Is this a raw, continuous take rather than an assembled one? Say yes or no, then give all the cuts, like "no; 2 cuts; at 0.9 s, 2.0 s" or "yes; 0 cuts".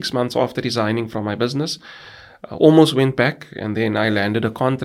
yes; 0 cuts